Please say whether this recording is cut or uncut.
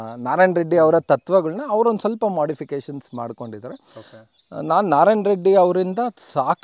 uncut